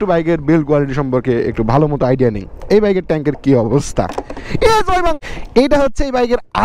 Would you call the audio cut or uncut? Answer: cut